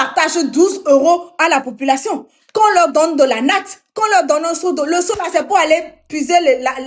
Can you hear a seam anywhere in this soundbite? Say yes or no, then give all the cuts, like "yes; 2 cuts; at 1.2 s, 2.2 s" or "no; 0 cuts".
no; 0 cuts